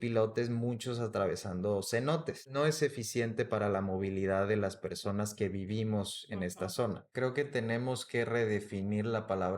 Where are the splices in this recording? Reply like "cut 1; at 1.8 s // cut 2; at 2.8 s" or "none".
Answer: cut 1; at 2.5 s // cut 2; at 7.1 s